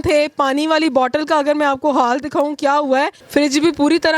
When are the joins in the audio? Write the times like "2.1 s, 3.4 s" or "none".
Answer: 3.2 s